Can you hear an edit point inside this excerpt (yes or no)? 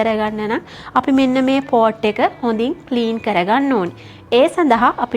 no